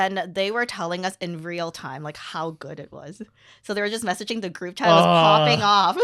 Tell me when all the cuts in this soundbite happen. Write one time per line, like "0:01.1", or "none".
none